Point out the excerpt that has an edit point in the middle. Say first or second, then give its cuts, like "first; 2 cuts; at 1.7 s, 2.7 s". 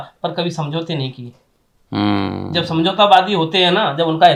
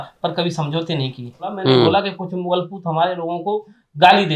second; 1 cut; at 1.6 s